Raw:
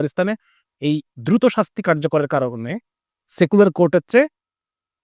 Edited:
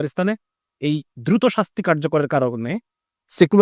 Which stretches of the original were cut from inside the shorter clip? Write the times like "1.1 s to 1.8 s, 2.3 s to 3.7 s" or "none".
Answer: none